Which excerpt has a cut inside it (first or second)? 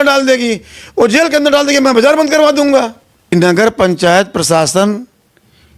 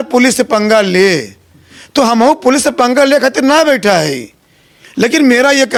first